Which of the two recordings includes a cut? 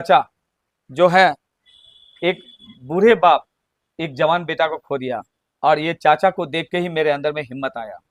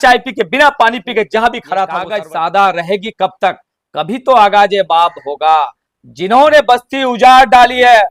second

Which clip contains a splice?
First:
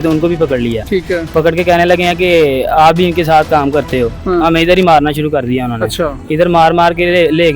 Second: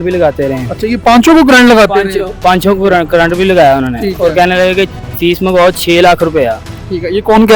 first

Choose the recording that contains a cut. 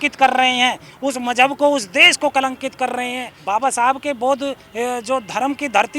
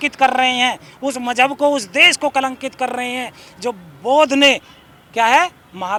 first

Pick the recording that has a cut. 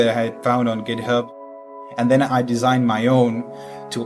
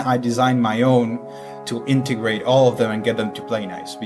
first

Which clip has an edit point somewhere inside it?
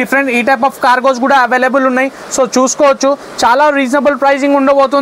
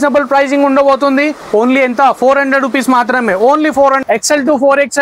second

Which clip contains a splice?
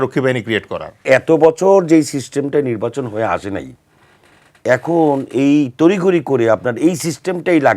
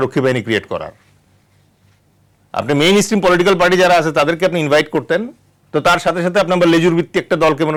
first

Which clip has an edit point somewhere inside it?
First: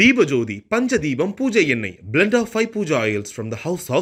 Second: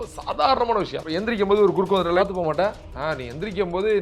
second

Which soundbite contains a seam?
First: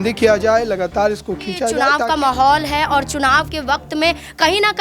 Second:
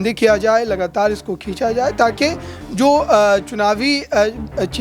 first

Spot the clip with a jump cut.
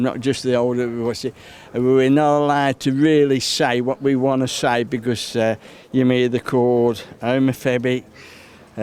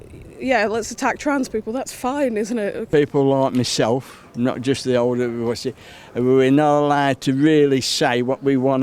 second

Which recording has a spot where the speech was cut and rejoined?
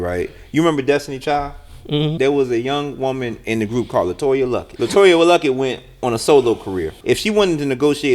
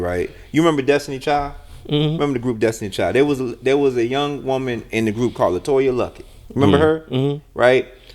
first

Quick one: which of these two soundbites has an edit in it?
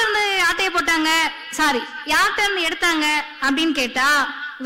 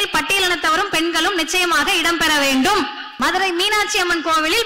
second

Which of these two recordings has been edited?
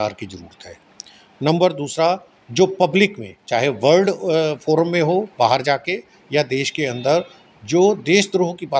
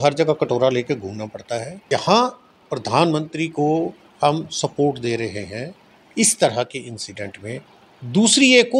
second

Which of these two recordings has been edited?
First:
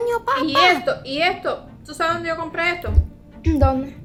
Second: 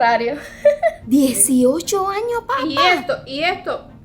second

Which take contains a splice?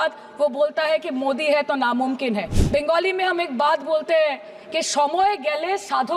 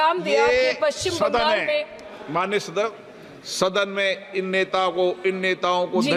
first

